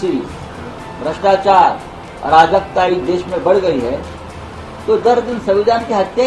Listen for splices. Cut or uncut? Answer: uncut